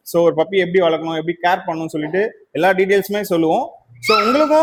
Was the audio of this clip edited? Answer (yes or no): no